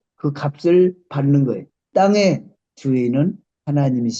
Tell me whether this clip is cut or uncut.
cut